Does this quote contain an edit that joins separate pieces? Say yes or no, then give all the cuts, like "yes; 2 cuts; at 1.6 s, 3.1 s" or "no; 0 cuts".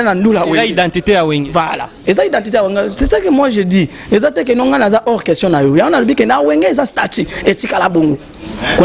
no; 0 cuts